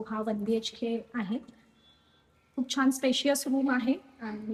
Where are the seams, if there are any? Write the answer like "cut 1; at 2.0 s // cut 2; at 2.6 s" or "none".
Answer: none